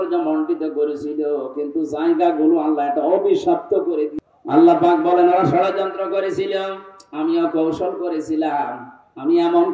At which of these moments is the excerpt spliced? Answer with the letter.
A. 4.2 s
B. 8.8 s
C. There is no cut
A